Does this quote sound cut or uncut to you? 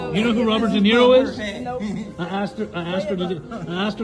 uncut